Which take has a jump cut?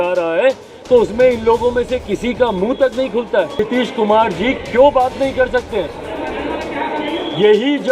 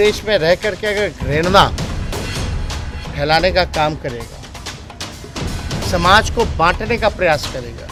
first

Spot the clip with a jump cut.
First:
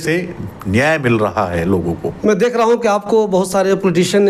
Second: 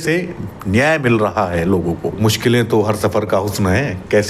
second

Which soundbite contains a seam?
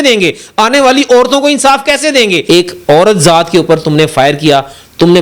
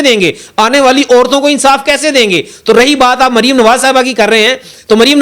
first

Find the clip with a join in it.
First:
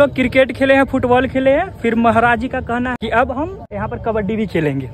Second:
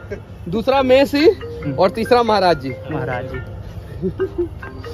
first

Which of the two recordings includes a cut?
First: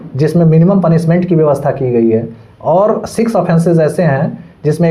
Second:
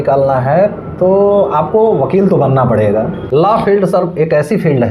second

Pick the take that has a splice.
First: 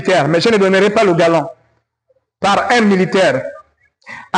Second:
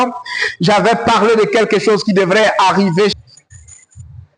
second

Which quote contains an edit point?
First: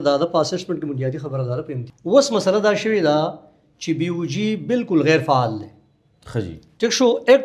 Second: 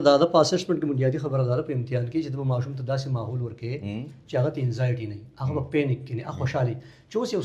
first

